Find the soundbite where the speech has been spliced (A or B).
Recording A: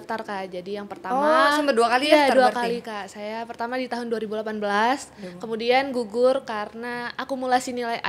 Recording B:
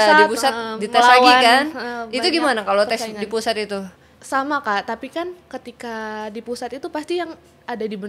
B